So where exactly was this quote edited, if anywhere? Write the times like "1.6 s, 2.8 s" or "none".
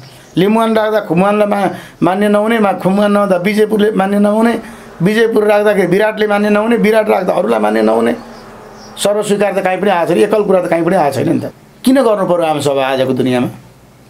11.4 s